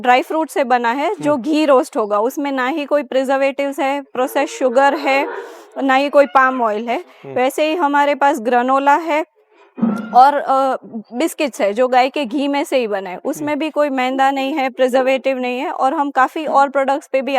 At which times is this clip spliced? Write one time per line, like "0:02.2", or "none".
none